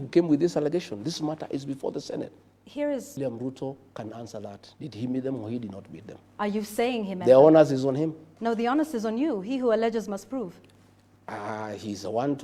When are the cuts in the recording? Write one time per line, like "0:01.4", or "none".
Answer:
0:03.2